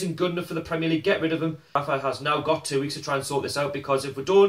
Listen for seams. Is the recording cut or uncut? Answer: cut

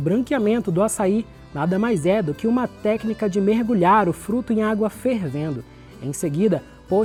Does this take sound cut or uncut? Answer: uncut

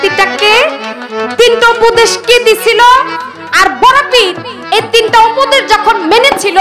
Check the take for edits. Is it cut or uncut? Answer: uncut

